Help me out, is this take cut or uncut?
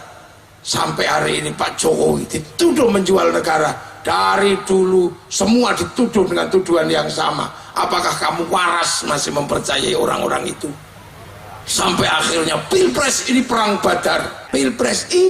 cut